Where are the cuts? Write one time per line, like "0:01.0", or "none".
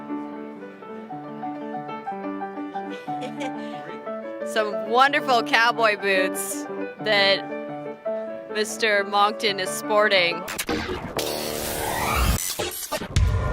0:02.5